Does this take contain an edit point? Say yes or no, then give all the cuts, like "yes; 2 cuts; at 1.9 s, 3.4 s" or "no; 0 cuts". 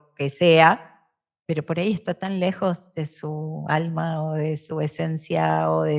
no; 0 cuts